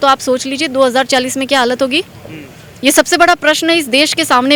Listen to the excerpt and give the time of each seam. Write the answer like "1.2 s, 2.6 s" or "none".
none